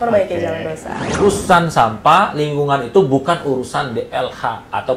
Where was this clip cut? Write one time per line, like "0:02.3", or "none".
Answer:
0:01.2